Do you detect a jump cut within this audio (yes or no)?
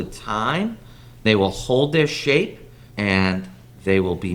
yes